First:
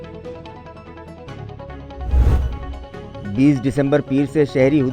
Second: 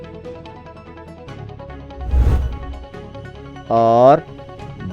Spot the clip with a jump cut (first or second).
second